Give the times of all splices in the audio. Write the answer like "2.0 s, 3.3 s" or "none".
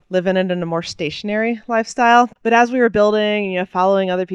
2.3 s